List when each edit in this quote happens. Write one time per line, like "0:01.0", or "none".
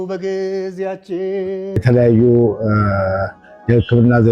0:01.8

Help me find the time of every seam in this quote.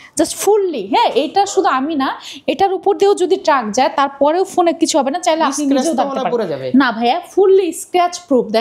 none

